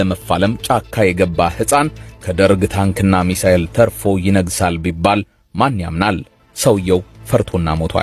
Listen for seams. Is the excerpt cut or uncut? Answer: uncut